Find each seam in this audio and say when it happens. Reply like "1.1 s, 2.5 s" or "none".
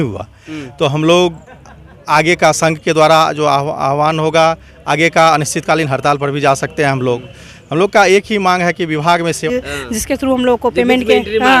9.4 s